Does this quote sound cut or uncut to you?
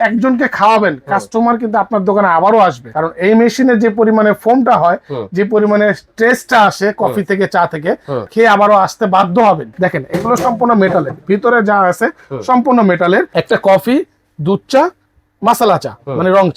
cut